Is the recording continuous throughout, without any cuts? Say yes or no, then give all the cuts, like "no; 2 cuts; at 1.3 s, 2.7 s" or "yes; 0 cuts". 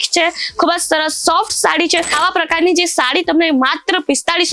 no; 1 cut; at 2.2 s